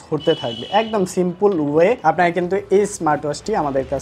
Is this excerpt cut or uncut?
uncut